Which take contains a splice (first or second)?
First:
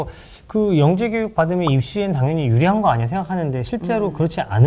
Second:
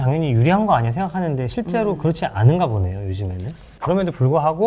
second